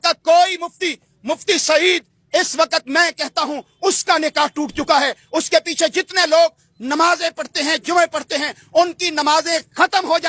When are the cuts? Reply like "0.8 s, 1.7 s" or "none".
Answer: none